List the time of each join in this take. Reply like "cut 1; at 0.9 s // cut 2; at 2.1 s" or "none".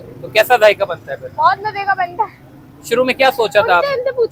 none